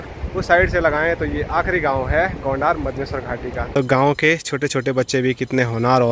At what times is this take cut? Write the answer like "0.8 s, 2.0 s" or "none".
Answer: 3.7 s